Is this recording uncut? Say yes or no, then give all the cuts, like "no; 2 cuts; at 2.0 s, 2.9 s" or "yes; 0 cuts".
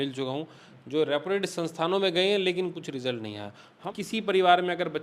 no; 1 cut; at 3.8 s